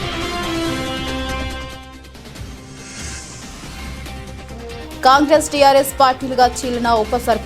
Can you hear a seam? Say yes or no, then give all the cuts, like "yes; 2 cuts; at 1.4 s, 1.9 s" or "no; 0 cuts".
no; 0 cuts